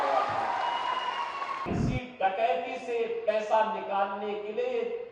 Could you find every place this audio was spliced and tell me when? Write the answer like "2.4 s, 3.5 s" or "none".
1.7 s